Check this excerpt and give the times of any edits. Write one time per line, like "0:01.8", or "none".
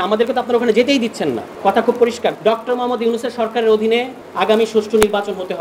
0:01.5
0:02.4
0:04.2